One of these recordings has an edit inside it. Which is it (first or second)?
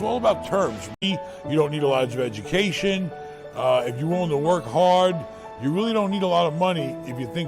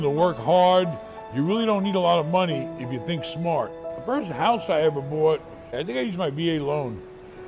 first